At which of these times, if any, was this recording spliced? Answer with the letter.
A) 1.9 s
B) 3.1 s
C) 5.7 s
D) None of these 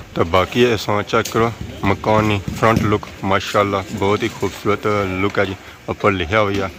D